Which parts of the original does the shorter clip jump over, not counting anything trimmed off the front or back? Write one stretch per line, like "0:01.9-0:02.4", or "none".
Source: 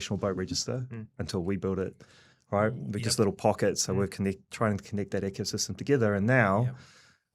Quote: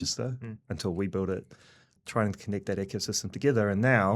0:02.4-0:04.4